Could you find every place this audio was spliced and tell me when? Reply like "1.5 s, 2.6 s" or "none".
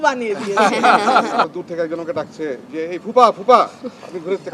1.4 s

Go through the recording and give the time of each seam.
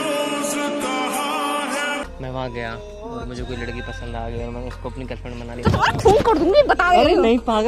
2.0 s

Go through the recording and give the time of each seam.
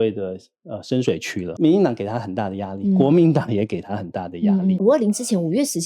1.5 s, 4.8 s

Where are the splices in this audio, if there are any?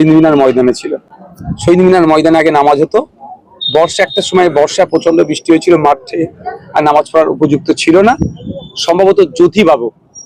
none

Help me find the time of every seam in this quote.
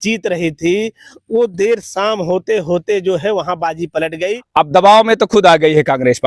4.4 s

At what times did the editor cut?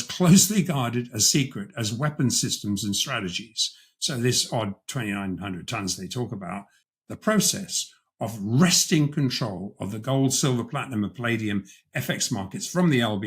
6.8 s

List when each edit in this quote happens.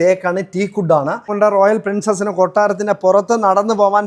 1.3 s

